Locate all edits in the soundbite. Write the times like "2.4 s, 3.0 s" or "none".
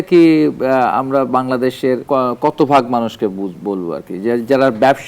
2.0 s